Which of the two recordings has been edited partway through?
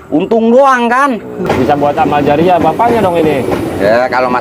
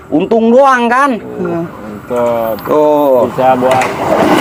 first; 1 cut; at 1.4 s

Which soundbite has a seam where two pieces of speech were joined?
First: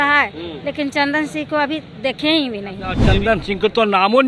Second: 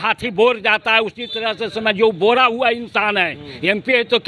first; 1 cut; at 3.0 s

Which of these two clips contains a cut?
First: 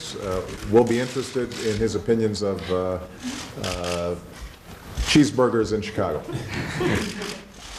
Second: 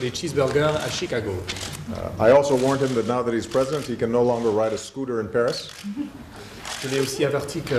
first; 1 cut; at 3.7 s

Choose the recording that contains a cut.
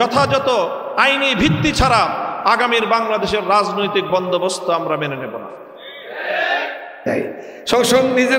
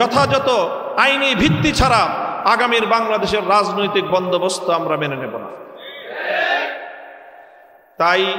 first; 1 cut; at 7.0 s

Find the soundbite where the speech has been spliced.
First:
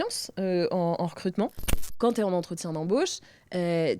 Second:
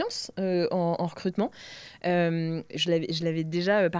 first; 1 cut; at 2.0 s

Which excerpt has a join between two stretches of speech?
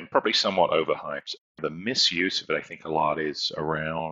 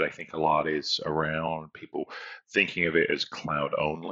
first; 1 cut; at 1.6 s

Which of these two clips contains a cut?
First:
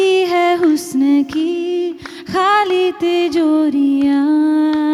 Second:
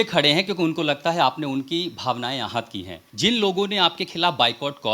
second; 1 cut; at 3.0 s

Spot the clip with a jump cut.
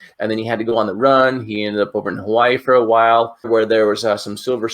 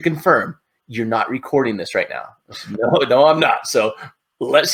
first; 1 cut; at 3.5 s

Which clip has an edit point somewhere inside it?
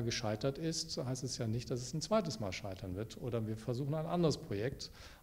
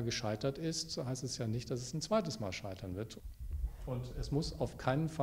second; 1 cut; at 3.1 s

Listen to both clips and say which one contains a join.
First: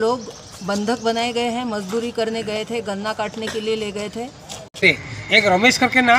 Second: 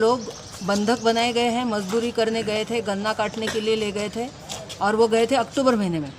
first; 1 cut; at 4.8 s

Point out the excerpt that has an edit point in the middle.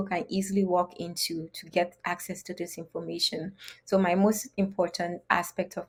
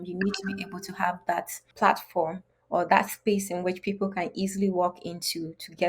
second; 1 cut; at 1.7 s

